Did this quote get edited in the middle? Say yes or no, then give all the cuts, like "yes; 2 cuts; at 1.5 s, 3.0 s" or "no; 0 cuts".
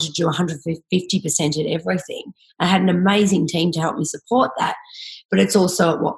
no; 0 cuts